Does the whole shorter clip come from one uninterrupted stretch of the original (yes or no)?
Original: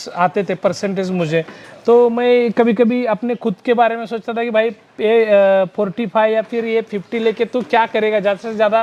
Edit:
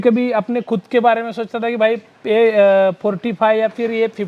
yes